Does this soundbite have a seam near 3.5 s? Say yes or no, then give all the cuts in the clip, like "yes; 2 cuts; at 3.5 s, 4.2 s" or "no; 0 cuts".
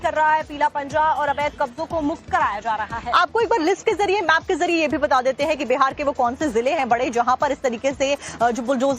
yes; 1 cut; at 3.5 s